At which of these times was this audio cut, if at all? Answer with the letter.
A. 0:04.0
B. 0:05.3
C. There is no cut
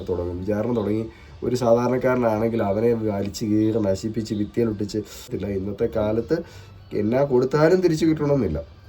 B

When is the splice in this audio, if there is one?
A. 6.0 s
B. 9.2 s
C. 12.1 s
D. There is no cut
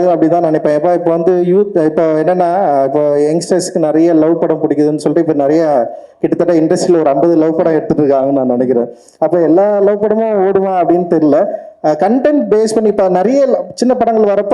D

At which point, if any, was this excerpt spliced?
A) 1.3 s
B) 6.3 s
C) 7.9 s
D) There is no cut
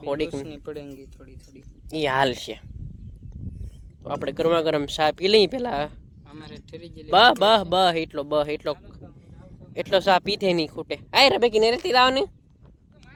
D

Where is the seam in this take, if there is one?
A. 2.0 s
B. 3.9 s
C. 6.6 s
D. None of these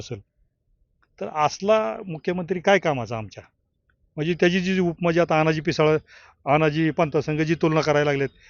D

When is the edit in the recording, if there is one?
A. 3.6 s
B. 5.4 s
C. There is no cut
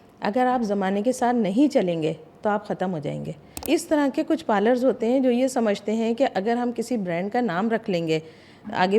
A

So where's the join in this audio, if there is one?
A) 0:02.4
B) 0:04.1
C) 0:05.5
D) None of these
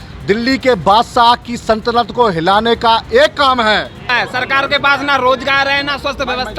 B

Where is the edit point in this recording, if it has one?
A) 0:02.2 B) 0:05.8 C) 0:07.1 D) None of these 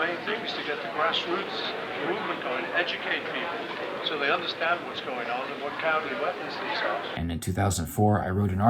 C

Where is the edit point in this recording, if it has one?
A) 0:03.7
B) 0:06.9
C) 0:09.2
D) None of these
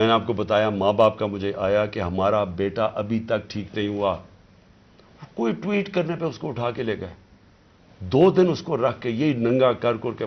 D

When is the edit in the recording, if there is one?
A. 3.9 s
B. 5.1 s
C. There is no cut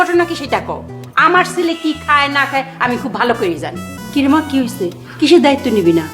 A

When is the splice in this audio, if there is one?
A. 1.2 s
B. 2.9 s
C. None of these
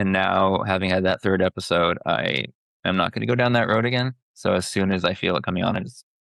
A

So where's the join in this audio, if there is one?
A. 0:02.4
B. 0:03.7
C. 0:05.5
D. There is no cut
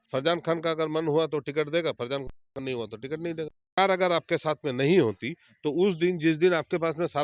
B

